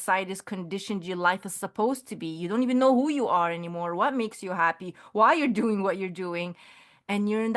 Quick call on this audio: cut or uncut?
uncut